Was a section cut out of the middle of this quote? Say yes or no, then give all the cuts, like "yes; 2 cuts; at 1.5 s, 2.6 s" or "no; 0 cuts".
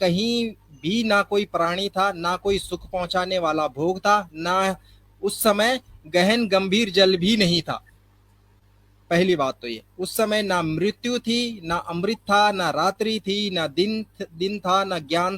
no; 0 cuts